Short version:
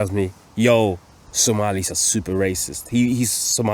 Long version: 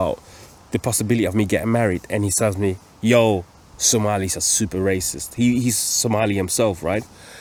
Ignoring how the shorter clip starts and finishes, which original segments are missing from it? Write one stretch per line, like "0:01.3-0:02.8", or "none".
none